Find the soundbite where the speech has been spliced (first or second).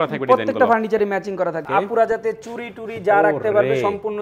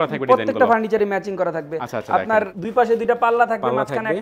first